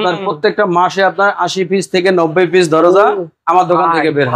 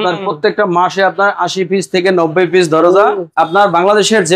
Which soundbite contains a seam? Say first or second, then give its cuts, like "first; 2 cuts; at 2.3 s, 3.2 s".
second; 1 cut; at 3.2 s